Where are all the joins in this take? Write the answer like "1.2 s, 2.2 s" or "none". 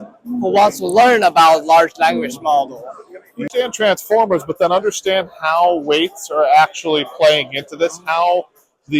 3.5 s

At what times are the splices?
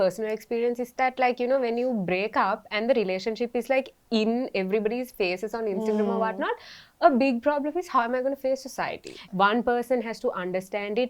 9.1 s

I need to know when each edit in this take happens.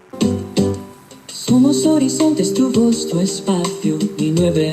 0.9 s

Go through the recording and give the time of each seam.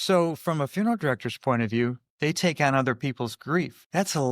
2.1 s

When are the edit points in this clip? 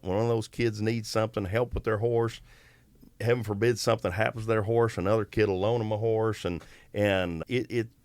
none

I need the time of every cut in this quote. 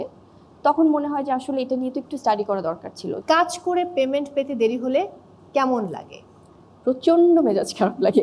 3.2 s

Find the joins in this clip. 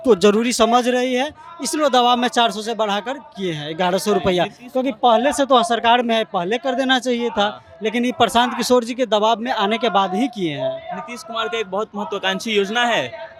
none

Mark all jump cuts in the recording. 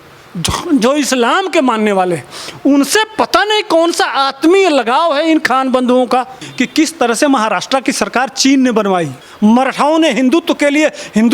6.4 s, 9.2 s

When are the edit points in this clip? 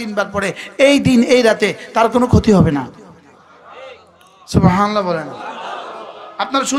none

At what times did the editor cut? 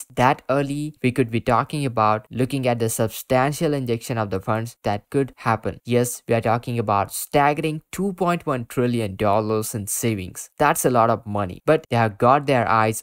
5.7 s, 11.9 s

